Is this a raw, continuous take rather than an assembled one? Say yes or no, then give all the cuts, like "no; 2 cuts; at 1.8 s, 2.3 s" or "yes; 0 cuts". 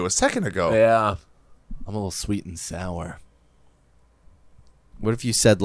yes; 0 cuts